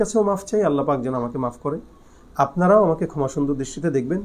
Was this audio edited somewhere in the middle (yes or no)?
no